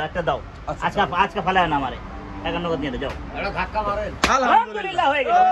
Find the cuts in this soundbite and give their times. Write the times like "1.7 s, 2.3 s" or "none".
none

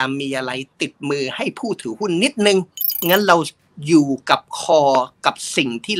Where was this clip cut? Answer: 3.0 s

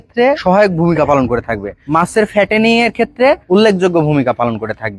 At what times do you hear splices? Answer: none

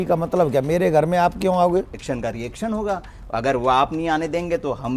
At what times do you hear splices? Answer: 2.0 s

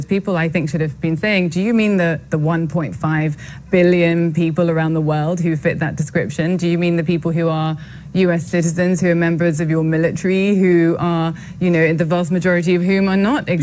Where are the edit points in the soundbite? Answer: none

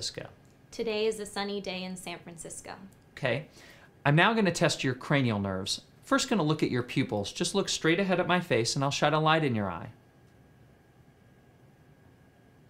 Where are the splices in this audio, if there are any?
5.0 s

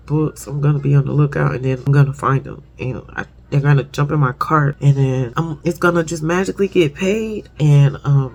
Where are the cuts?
none

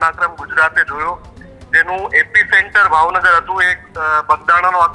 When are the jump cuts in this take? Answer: none

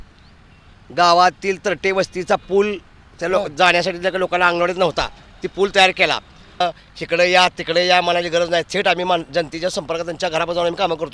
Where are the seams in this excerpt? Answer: 6.6 s

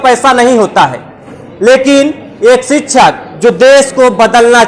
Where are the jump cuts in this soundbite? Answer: none

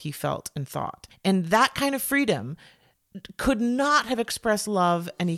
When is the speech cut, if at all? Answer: 1.1 s

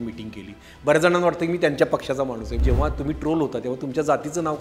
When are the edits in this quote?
2.6 s

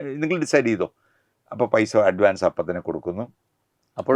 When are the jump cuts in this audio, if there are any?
none

